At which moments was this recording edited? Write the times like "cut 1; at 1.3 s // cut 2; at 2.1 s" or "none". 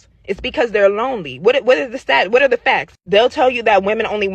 cut 1; at 1.5 s